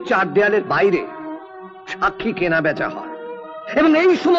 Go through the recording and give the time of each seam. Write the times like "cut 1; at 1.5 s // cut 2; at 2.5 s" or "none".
none